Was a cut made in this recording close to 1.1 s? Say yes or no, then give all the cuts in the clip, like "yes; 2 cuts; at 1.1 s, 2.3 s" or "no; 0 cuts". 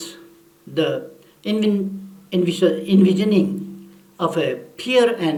no; 0 cuts